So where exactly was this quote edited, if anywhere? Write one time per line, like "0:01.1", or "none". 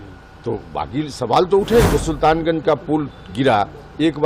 0:01.8